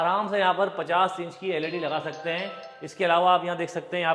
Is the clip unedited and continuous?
yes; 0 cuts

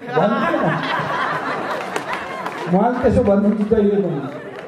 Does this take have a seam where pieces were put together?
no; 0 cuts

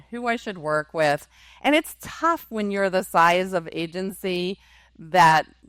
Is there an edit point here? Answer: no; 0 cuts

